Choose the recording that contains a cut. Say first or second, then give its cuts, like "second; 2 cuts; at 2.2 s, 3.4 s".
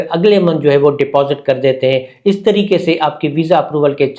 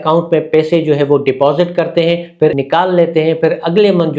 second; 1 cut; at 2.5 s